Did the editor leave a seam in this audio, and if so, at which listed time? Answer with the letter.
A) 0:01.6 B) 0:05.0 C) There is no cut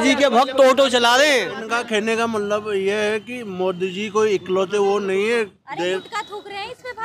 A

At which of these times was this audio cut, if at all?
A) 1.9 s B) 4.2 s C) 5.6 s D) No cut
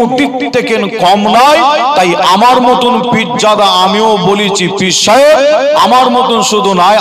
D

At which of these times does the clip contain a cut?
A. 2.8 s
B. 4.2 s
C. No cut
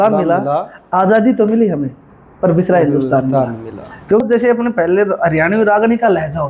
B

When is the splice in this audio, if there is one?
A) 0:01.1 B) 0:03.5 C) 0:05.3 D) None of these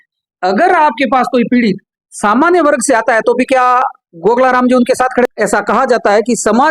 C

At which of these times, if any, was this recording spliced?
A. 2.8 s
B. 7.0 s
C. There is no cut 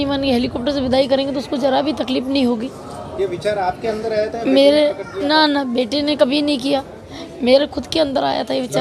C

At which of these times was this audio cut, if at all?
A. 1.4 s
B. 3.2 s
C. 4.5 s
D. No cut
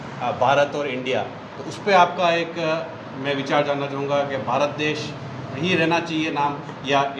D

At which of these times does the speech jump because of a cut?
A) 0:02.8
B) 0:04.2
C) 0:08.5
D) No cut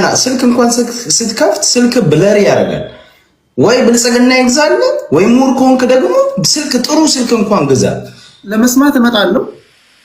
C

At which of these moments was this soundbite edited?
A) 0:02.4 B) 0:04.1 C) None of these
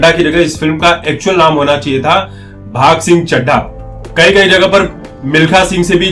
C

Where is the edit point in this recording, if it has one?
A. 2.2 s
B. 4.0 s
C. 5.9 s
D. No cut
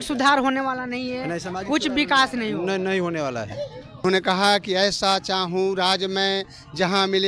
B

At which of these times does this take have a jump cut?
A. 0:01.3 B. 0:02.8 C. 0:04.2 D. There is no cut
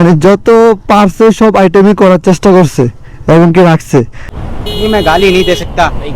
C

